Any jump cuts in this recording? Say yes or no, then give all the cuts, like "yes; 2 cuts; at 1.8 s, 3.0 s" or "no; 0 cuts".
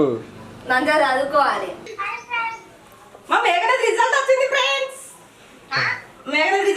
yes; 1 cut; at 1.8 s